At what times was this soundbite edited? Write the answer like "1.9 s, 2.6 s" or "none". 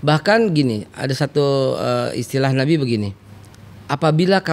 none